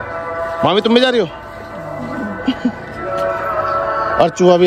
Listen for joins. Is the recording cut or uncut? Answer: uncut